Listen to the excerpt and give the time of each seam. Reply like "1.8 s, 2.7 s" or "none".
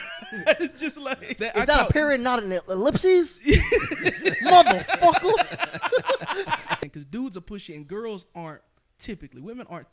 1.3 s, 6.8 s